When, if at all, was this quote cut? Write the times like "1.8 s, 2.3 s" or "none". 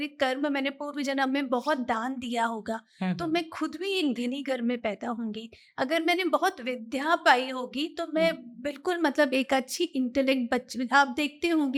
none